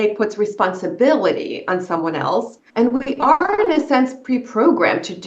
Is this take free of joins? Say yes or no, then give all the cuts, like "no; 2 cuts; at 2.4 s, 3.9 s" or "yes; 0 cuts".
no; 1 cut; at 2.6 s